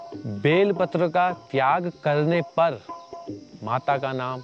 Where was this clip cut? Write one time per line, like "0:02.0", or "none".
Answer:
none